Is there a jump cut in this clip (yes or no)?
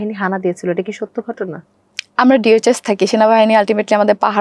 no